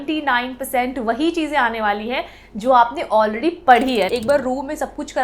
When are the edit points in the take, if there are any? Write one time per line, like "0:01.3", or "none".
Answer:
0:04.1